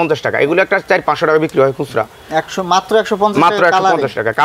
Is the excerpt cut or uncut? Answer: uncut